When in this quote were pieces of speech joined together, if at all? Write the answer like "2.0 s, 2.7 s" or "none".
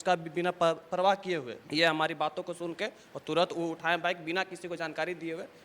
1.6 s